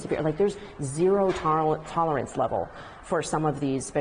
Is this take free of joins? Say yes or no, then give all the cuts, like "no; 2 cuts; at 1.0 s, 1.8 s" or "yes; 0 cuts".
yes; 0 cuts